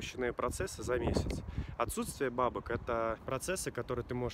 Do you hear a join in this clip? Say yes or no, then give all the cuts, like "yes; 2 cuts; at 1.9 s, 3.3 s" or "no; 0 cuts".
no; 0 cuts